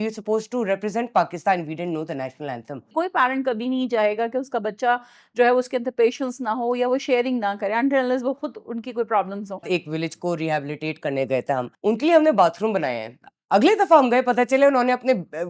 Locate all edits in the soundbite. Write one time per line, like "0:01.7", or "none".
0:02.9
0:09.7
0:11.7